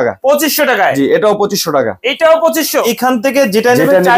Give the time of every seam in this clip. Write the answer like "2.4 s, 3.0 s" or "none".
2.8 s

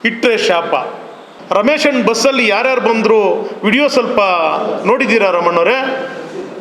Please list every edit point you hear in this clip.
1.0 s

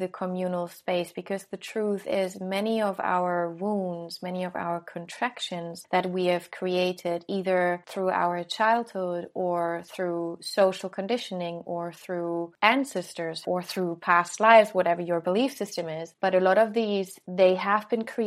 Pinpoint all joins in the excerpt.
5.8 s, 7.8 s, 13.4 s, 16.1 s, 17.2 s

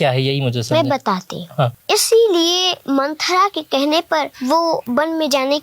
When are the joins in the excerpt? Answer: 1.8 s, 2.7 s, 4.7 s

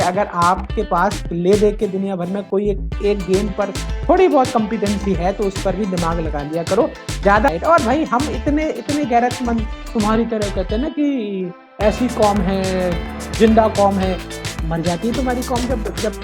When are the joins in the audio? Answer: 7.5 s

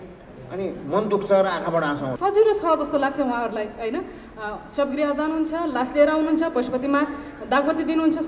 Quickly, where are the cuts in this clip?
2.1 s

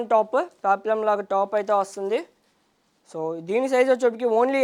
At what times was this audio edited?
none

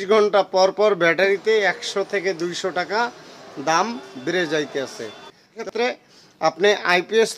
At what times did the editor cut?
5.6 s

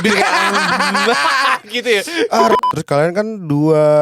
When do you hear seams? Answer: 2.6 s

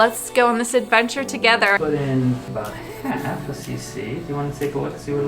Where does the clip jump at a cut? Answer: 1.8 s

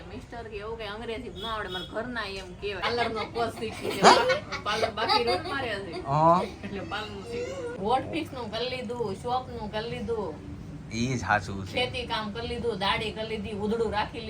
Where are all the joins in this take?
2.8 s, 7.8 s

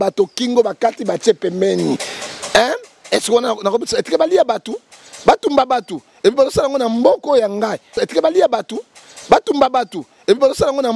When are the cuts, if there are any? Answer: 7.9 s

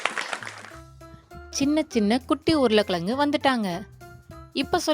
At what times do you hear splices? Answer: none

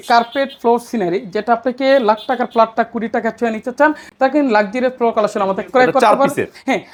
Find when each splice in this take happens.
none

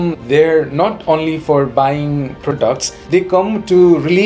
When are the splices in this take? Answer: 2.6 s

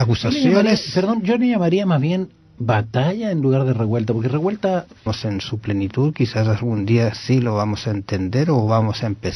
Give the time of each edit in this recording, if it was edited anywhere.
none

